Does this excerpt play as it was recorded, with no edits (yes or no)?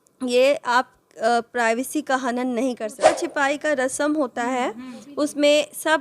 no